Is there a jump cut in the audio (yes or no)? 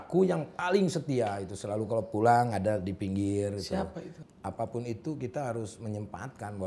yes